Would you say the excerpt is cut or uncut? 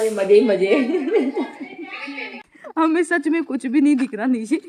cut